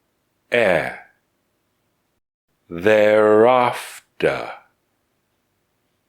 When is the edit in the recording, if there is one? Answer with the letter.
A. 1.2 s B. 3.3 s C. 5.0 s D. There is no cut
D